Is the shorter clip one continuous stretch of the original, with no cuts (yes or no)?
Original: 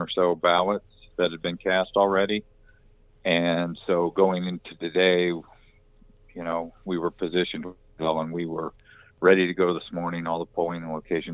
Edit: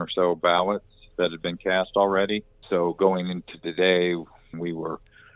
no